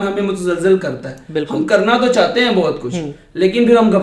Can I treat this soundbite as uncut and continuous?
yes; 0 cuts

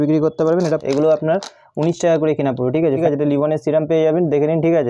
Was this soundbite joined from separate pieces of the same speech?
yes; 2 cuts; at 0.8 s, 3.0 s

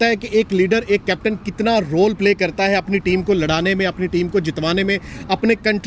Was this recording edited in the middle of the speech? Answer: no; 0 cuts

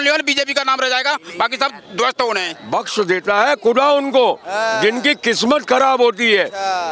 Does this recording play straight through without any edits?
no; 1 cut; at 2.5 s

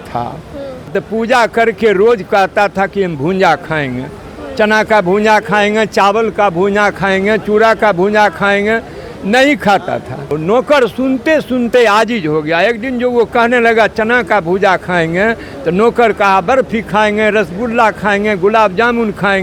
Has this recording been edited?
yes; 2 cuts; at 0.9 s, 10.4 s

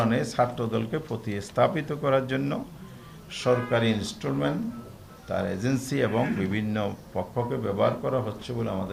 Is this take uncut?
yes; 0 cuts

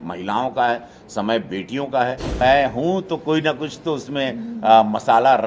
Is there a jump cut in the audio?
yes; 1 cut; at 2.4 s

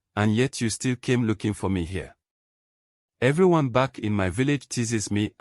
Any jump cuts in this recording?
no; 0 cuts

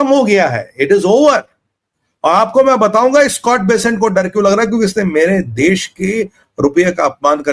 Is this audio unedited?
yes; 0 cuts

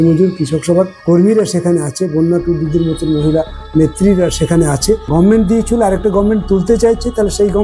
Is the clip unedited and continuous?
no; 2 cuts; at 1.0 s, 5.0 s

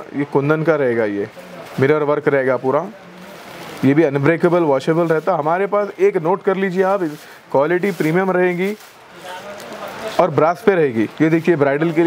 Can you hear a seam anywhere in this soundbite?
no; 0 cuts

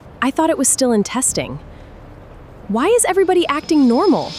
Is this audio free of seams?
yes; 0 cuts

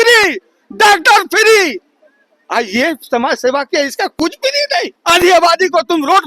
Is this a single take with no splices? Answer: no; 1 cut; at 4.9 s

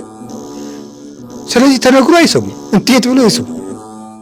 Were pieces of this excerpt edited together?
no; 0 cuts

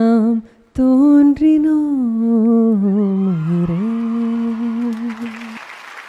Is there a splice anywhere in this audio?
no; 0 cuts

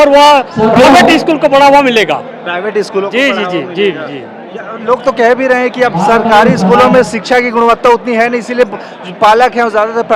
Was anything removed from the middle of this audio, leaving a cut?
no; 0 cuts

